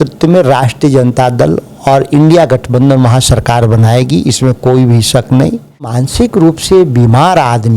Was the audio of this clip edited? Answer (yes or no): yes